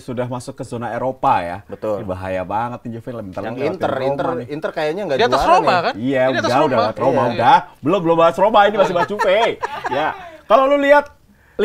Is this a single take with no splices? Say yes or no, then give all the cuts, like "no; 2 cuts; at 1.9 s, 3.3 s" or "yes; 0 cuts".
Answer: yes; 0 cuts